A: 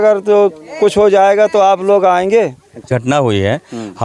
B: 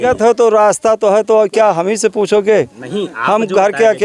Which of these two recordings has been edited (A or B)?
A